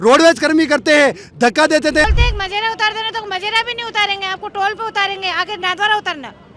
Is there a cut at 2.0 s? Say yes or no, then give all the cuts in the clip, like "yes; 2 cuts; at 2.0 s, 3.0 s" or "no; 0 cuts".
yes; 1 cut; at 2.0 s